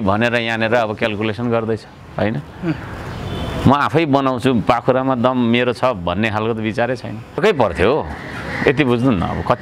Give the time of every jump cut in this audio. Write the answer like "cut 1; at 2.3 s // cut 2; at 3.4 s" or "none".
cut 1; at 7.4 s